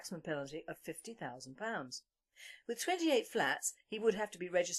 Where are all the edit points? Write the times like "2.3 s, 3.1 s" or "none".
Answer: none